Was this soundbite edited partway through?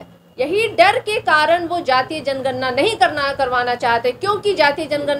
no; 0 cuts

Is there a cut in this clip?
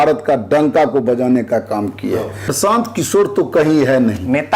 yes; 1 cut; at 2.4 s

